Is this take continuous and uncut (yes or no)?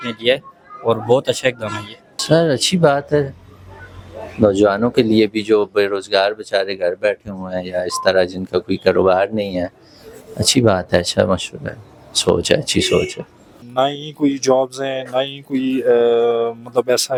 yes